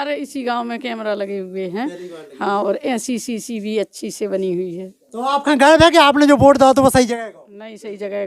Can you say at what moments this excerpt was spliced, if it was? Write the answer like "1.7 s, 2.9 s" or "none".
none

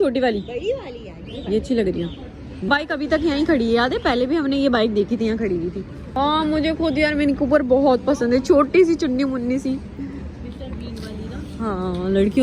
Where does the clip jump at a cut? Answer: none

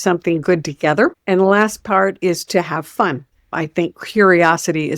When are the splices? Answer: 3.5 s

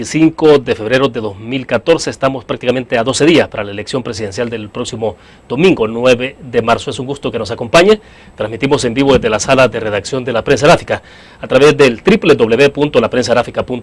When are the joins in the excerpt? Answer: none

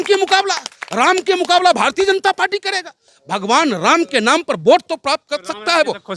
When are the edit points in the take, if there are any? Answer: none

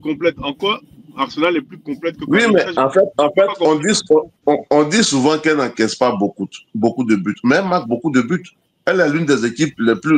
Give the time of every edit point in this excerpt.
none

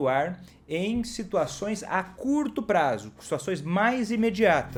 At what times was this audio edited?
none

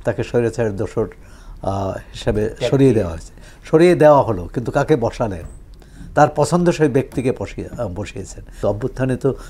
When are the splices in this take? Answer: 8.5 s

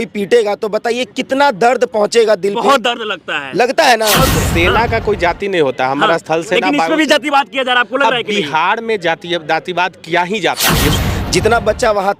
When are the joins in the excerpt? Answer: 4.3 s, 11.0 s

